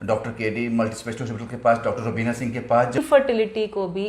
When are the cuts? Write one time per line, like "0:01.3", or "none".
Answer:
0:03.0